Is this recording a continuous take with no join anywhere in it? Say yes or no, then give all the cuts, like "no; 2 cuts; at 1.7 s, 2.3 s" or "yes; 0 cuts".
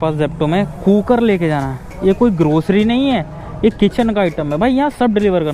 yes; 0 cuts